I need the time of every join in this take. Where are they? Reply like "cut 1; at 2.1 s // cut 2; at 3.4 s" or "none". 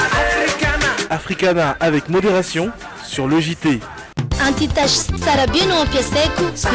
cut 1; at 4.1 s